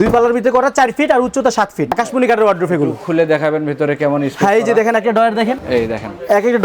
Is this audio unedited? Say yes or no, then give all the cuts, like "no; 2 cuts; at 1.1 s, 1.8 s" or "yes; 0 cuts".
no; 2 cuts; at 1.9 s, 5.6 s